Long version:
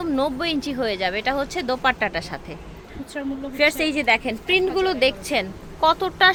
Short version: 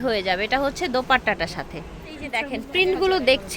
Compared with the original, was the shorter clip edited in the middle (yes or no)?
yes